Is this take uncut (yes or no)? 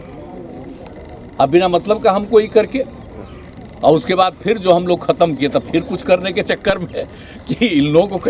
yes